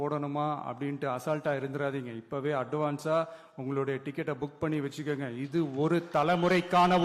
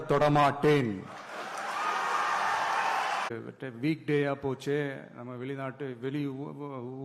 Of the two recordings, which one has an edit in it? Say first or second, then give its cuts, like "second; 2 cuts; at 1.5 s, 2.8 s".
second; 1 cut; at 3.3 s